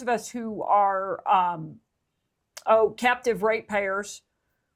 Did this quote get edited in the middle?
no; 0 cuts

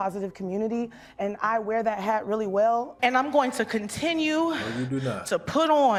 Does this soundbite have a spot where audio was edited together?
no; 0 cuts

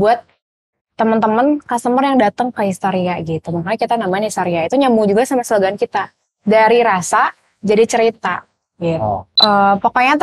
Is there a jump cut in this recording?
yes; 1 cut; at 9.3 s

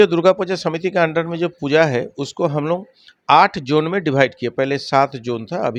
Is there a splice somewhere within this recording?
no; 0 cuts

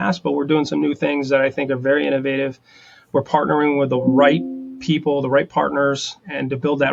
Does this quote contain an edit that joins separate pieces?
no; 0 cuts

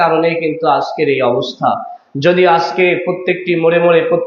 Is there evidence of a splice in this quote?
no; 0 cuts

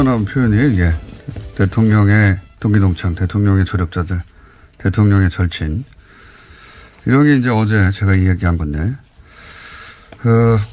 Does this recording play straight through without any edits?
no; 1 cut; at 3.9 s

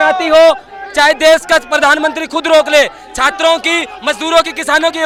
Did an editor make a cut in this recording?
no; 0 cuts

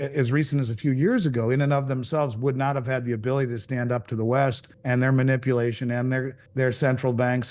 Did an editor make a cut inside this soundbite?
yes; 2 cuts; at 4.7 s, 6.4 s

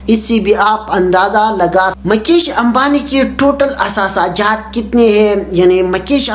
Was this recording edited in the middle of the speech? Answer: yes; 1 cut; at 2.0 s

